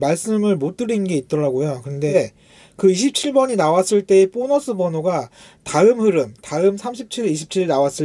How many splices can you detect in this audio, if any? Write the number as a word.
one